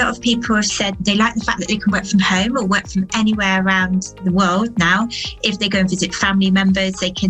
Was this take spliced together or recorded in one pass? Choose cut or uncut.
cut